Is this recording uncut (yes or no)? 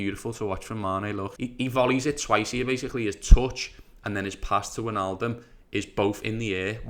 no